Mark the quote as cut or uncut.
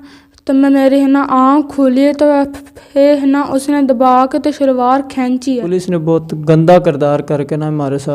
cut